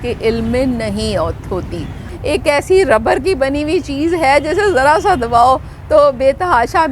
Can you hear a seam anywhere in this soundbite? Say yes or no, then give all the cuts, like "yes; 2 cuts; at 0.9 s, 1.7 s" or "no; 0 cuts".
yes; 1 cut; at 2.1 s